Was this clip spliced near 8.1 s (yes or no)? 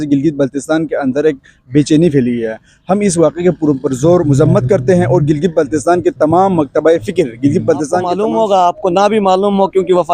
yes